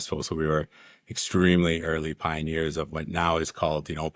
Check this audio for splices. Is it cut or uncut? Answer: uncut